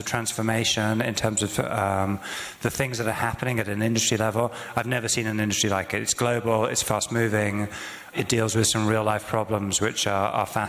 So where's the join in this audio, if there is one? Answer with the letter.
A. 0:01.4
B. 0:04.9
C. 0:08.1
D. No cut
C